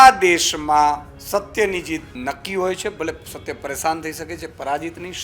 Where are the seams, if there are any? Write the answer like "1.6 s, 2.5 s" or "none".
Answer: 1.1 s, 2.1 s

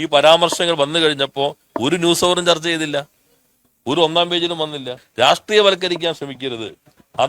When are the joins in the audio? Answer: 5.0 s

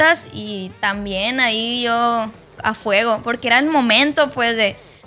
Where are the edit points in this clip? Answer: none

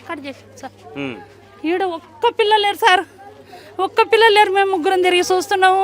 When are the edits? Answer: none

